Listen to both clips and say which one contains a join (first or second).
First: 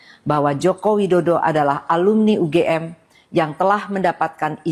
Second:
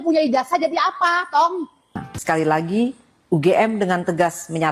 second